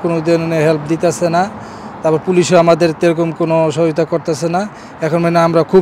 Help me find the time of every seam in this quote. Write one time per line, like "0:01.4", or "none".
none